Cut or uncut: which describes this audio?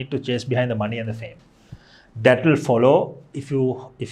uncut